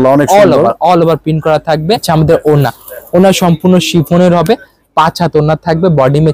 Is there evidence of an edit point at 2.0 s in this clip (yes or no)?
yes